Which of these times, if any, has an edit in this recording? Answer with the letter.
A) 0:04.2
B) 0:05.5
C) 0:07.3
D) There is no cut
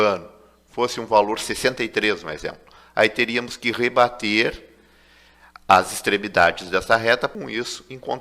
C